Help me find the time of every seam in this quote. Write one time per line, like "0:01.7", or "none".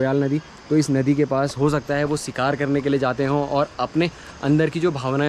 none